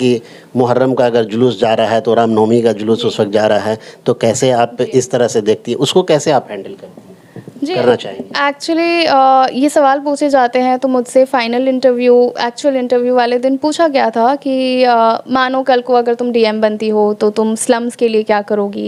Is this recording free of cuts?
yes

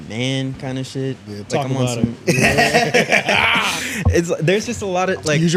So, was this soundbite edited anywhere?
no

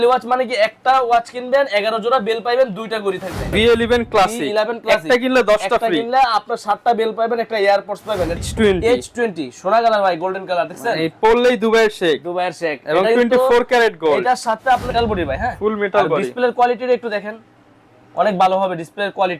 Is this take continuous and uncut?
no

